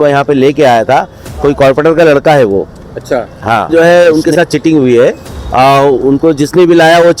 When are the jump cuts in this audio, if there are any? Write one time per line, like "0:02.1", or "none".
0:01.2
0:03.7